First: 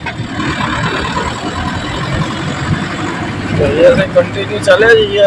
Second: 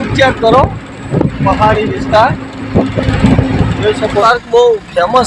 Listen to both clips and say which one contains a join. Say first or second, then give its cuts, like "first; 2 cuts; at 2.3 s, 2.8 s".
second; 1 cut; at 4.2 s